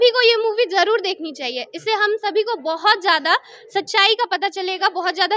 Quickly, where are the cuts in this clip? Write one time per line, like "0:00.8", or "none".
none